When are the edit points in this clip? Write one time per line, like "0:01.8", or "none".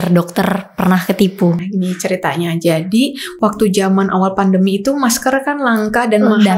0:01.7

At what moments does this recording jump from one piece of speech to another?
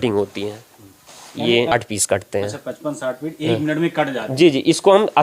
0:01.7

